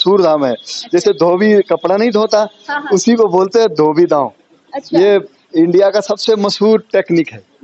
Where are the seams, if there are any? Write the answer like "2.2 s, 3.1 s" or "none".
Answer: none